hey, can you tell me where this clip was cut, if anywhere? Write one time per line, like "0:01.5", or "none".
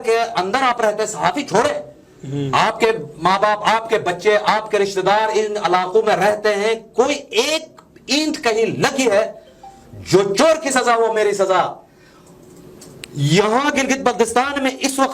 none